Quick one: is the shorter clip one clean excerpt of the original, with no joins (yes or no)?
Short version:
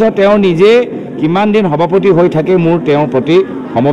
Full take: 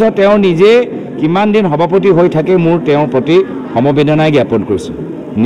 yes